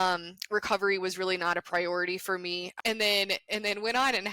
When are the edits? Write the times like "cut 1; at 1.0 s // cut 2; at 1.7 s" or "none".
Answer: cut 1; at 2.7 s